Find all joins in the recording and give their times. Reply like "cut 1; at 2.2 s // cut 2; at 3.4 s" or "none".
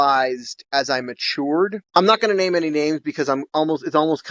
none